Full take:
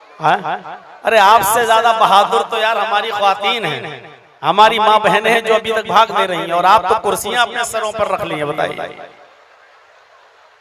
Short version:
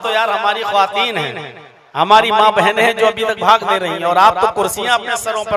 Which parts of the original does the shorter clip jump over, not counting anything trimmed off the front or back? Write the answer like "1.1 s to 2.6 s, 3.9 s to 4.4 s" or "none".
none

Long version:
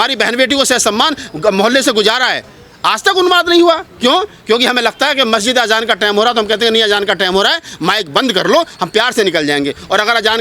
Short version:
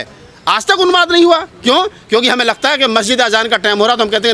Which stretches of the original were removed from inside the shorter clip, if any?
none

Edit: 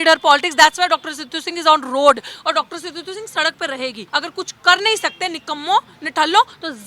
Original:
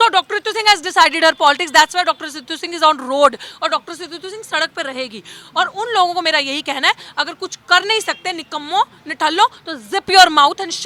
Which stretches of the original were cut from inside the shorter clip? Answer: 5.2 s to 7.1 s

